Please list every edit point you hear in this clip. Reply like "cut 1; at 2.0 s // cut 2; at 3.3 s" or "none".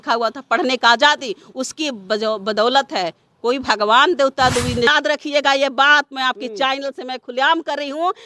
cut 1; at 4.9 s